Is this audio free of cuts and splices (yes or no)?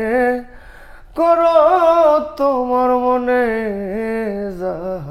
yes